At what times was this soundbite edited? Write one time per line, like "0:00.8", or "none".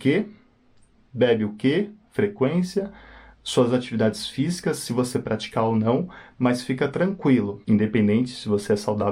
0:07.6